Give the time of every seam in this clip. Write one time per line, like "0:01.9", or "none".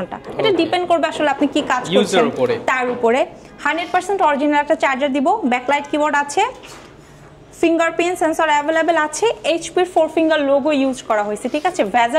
none